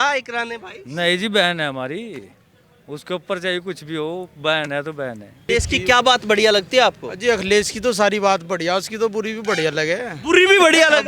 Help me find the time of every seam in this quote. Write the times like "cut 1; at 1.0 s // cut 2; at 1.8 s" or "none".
cut 1; at 5.5 s

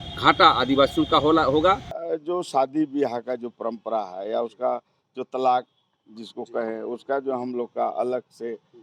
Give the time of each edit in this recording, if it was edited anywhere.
cut 1; at 1.9 s

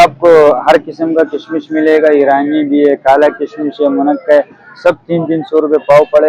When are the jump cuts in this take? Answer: none

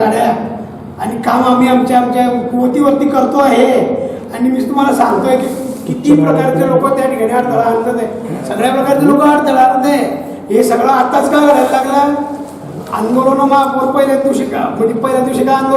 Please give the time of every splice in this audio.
none

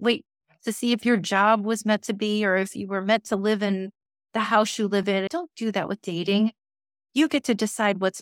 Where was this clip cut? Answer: cut 1; at 5.3 s

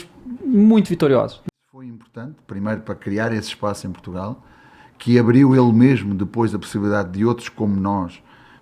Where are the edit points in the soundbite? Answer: cut 1; at 1.4 s

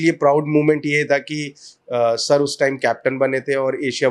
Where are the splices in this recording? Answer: none

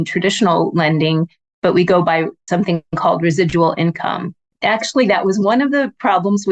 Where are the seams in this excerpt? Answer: cut 1; at 2.4 s // cut 2; at 4.5 s

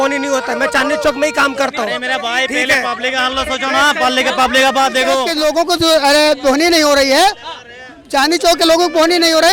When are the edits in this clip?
cut 1; at 5.5 s

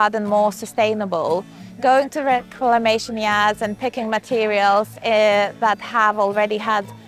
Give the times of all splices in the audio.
none

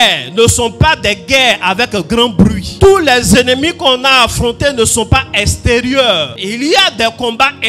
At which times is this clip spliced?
cut 1; at 2.7 s // cut 2; at 6.4 s

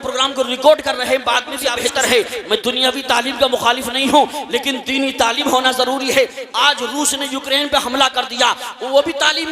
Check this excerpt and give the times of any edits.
cut 1; at 1.7 s

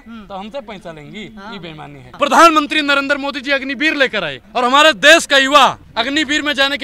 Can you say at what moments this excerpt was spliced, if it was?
cut 1; at 2.0 s // cut 2; at 4.4 s // cut 3; at 5.8 s

